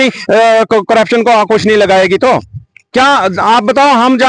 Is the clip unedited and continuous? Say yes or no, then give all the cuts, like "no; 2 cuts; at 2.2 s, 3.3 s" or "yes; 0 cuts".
yes; 0 cuts